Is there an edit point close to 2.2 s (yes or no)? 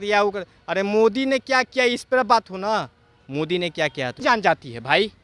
no